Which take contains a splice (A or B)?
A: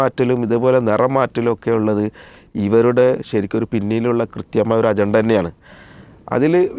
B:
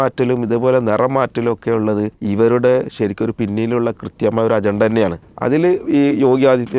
B